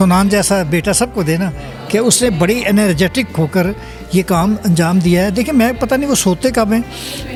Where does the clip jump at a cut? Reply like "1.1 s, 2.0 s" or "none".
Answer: none